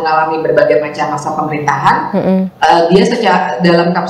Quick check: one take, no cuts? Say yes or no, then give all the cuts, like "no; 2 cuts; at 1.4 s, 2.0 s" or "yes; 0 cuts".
yes; 0 cuts